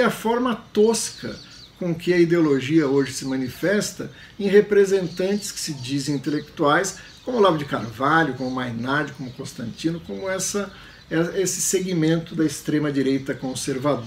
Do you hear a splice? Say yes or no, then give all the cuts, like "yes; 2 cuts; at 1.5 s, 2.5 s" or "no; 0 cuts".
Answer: no; 0 cuts